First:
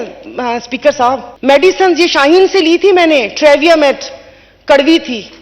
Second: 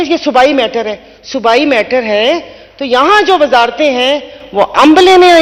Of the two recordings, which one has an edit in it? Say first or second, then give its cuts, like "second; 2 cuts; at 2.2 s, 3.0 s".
first; 1 cut; at 1.3 s